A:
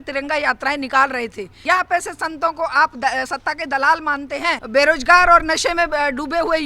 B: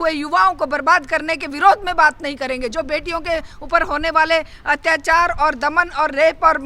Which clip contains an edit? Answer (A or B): A